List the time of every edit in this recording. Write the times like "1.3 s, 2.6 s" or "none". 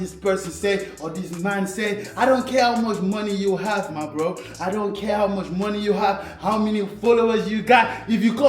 none